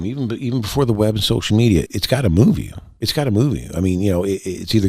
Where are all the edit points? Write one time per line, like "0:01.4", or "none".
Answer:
0:01.9